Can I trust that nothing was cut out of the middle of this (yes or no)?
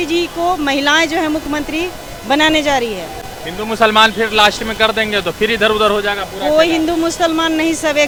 yes